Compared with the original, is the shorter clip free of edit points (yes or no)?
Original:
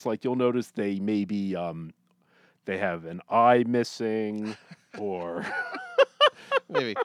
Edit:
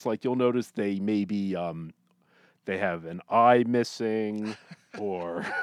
yes